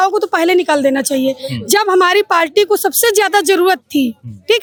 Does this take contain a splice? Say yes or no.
no